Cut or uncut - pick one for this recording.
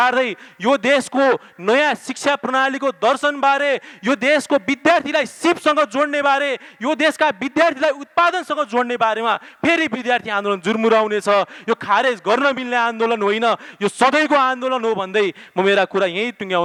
uncut